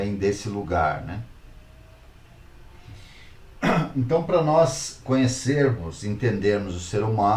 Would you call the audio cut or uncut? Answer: uncut